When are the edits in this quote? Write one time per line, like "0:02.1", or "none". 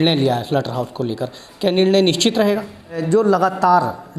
0:03.0